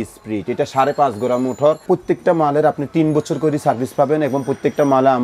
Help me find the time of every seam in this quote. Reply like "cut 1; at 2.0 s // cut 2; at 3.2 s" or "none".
cut 1; at 1.9 s